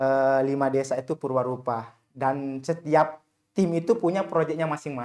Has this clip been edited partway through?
no; 0 cuts

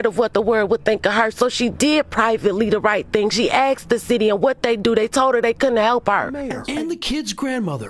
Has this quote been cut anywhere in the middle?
yes; 1 cut; at 6.4 s

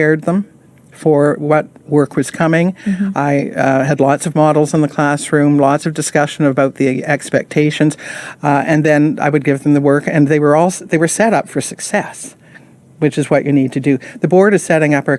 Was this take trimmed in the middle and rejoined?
no; 0 cuts

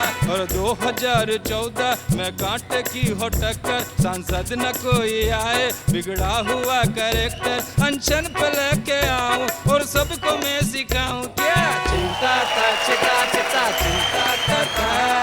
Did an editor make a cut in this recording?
no; 0 cuts

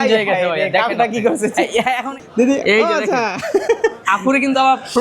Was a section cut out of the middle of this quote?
yes; 1 cut; at 2.2 s

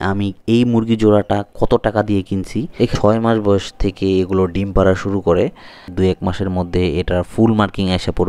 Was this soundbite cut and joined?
yes; 2 cuts; at 2.9 s, 5.9 s

